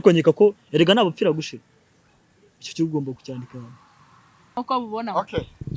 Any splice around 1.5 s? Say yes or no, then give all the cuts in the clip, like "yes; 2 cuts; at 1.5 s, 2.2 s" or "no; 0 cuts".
no; 1 cut; at 4.6 s